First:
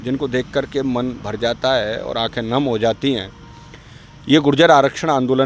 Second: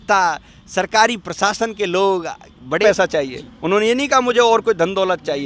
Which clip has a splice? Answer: second; 1 cut; at 2.8 s

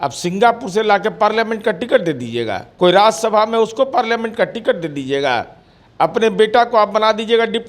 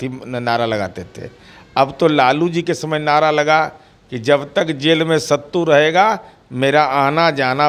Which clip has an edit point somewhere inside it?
first; 1 cut; at 2.7 s

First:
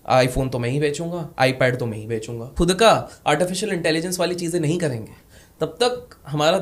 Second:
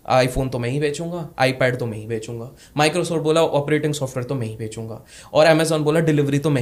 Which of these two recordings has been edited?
first; 1 cut; at 2.5 s

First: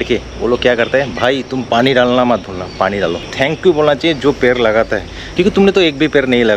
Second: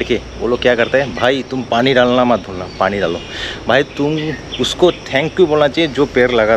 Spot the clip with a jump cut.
first; 2 cuts; at 3.3 s, 5.2 s

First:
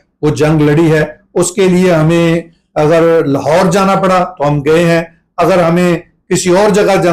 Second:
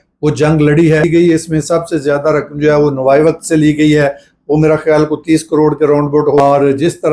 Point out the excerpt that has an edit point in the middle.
second; 2 cuts; at 1.1 s, 6.4 s

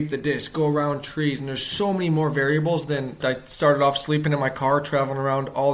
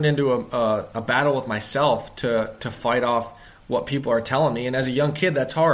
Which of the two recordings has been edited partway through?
first; 1 cut; at 3.2 s

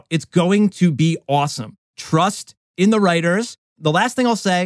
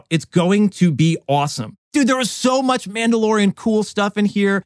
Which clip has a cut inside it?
second; 1 cut; at 1.8 s

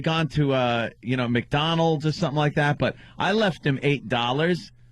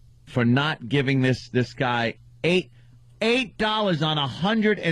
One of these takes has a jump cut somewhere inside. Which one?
first; 1 cut; at 1.6 s

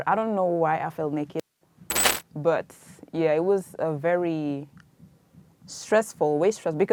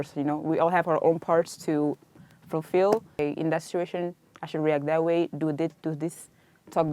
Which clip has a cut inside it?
second; 1 cut; at 3.1 s

